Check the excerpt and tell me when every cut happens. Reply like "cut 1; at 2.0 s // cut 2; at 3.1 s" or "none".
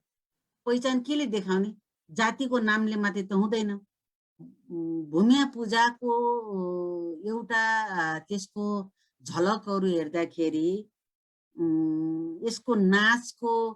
cut 1; at 4.4 s